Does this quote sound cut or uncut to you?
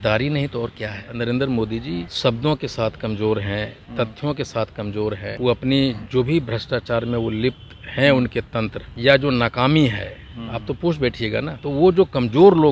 cut